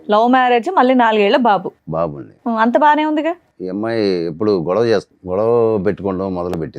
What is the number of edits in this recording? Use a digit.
2